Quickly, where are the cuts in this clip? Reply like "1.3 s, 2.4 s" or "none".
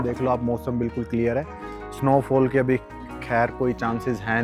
none